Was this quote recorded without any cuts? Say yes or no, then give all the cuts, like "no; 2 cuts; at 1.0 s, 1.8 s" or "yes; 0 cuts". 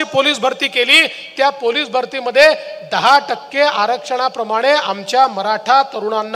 yes; 0 cuts